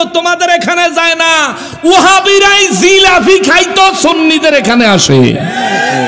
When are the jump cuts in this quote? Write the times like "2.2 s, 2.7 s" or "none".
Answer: none